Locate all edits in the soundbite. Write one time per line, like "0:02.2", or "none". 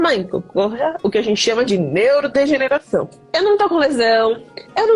0:03.2